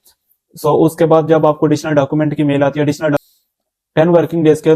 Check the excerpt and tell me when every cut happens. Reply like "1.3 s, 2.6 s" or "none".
3.2 s